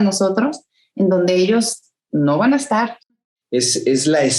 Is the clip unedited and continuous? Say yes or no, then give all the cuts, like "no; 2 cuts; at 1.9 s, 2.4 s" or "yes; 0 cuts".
no; 1 cut; at 2.9 s